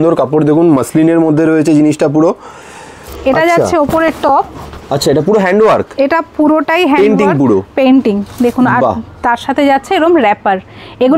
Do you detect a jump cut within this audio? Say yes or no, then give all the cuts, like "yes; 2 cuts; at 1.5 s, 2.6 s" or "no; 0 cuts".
yes; 1 cut; at 3.0 s